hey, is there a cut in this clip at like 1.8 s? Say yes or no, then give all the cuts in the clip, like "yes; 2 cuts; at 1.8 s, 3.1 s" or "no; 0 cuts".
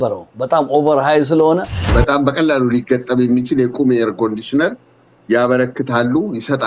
yes; 1 cut; at 1.8 s